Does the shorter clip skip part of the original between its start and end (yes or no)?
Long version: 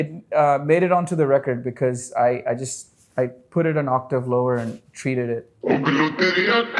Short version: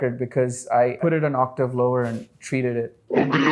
yes